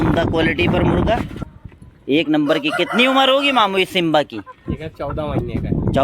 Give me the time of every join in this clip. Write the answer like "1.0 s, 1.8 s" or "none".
1.5 s